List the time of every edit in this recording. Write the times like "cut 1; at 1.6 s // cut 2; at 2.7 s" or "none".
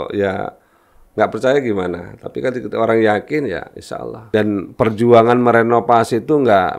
cut 1; at 4.1 s